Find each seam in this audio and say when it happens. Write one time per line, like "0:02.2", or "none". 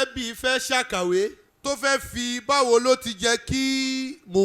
0:01.5